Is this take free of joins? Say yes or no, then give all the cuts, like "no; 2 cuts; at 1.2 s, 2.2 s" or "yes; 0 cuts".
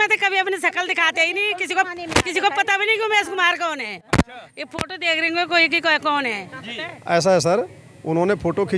yes; 0 cuts